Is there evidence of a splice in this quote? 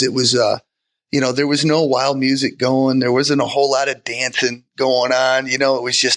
no; 0 cuts

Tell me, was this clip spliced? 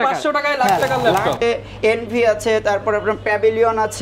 yes; 1 cut; at 1.4 s

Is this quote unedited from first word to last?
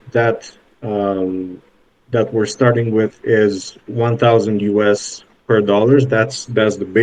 yes; 0 cuts

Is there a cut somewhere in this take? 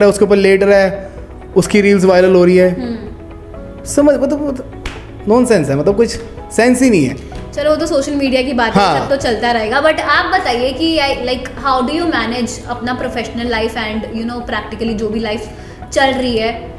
no; 0 cuts

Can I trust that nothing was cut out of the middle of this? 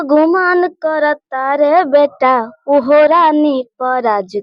yes; 0 cuts

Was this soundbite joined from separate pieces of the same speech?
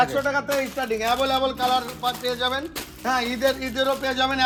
no; 0 cuts

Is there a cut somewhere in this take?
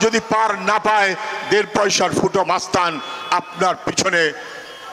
no; 0 cuts

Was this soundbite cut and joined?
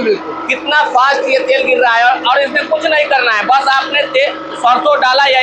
no; 0 cuts

